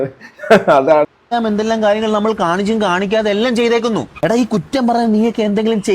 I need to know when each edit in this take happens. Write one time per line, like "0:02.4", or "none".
0:01.2